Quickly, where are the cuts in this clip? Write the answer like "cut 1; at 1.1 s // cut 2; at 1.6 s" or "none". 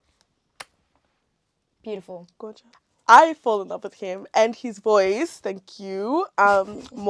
cut 1; at 2.6 s

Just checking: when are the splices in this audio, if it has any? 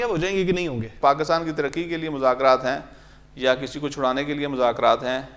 cut 1; at 1.0 s

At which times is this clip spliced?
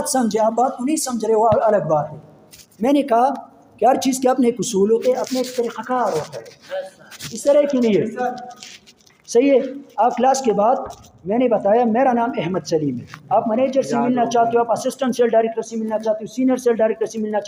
none

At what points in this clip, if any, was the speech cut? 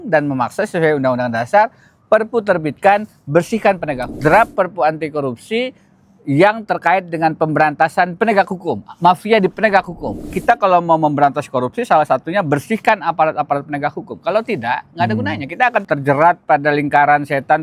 cut 1; at 4.1 s // cut 2; at 10.2 s

